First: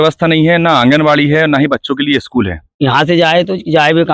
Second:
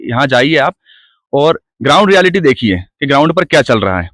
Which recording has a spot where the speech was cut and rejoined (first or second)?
first